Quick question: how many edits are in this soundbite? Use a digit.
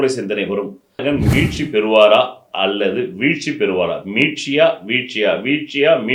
1